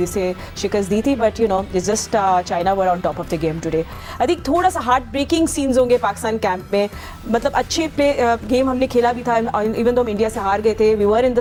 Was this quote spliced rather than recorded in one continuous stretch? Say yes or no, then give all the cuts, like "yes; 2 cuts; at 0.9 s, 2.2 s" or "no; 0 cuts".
no; 0 cuts